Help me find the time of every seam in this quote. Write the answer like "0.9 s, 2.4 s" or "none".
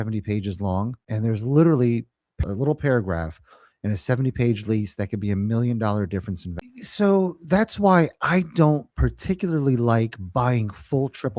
1.0 s, 2.4 s, 6.5 s